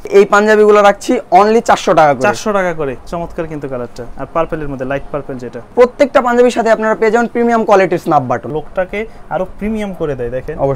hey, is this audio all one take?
no; 3 cuts; at 3.0 s, 5.7 s, 8.5 s

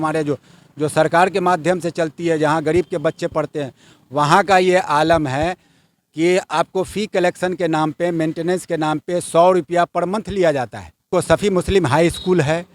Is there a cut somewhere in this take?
yes; 1 cut; at 11.1 s

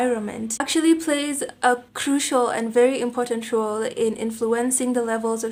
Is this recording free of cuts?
yes; 0 cuts

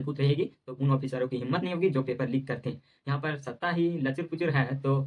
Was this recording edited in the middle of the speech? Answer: no; 0 cuts

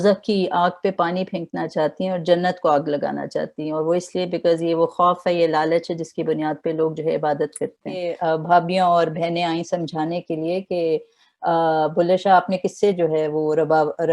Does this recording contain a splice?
yes; 1 cut; at 8.1 s

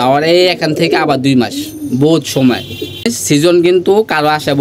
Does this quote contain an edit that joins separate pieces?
yes; 1 cut; at 3.1 s

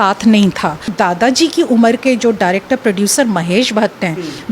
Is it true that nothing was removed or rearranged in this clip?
no; 1 cut; at 0.9 s

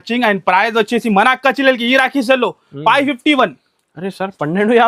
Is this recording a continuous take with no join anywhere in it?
yes; 0 cuts

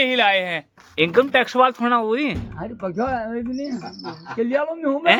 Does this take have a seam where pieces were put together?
no; 0 cuts

